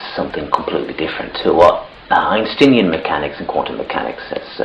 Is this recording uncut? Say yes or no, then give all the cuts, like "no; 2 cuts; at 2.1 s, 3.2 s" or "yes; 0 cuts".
no; 1 cut; at 2.2 s